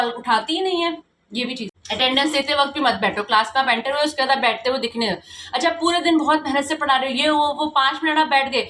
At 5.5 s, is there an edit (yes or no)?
no